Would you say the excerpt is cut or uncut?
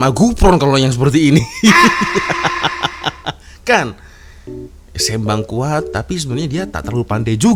uncut